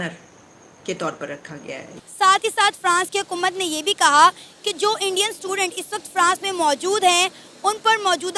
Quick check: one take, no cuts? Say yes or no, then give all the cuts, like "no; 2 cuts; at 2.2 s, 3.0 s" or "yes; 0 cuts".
no; 1 cut; at 1.9 s